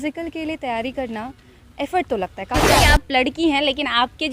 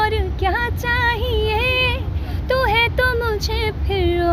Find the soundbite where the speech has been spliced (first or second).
first